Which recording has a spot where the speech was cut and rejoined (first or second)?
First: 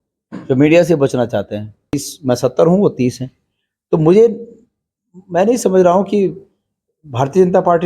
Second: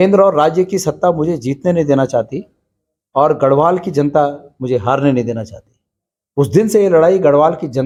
first